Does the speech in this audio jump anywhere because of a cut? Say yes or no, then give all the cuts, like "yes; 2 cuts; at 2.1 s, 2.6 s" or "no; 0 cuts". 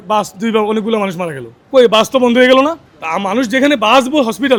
no; 0 cuts